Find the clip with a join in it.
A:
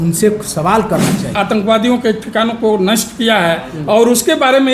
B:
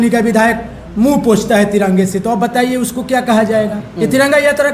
A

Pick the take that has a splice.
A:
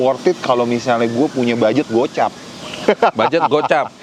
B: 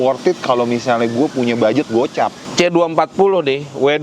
B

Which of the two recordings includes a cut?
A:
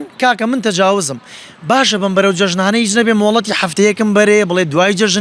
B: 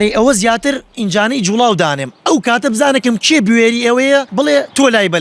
B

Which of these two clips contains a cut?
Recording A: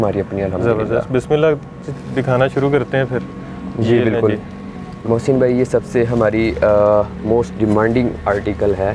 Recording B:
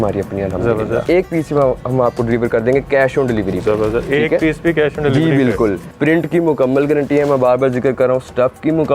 B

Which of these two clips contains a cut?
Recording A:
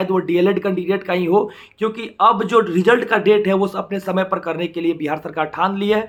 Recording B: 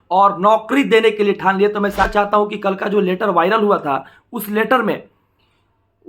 B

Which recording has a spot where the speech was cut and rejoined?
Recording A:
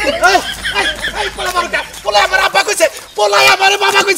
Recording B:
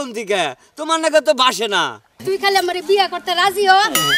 B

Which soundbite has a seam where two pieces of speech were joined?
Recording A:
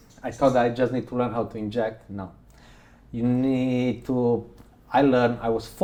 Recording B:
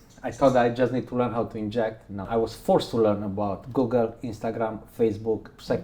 B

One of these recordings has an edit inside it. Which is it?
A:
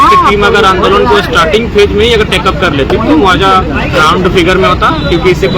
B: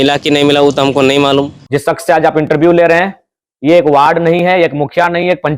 B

